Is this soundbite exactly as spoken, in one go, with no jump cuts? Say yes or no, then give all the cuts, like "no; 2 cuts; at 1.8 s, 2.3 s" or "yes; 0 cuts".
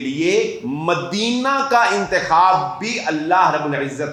yes; 0 cuts